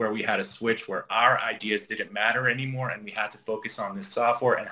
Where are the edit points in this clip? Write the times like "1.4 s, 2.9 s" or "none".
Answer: none